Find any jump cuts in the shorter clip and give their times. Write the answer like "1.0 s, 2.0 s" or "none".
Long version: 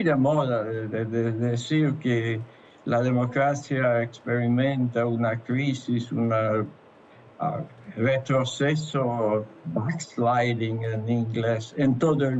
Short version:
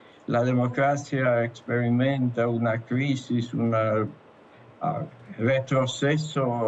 none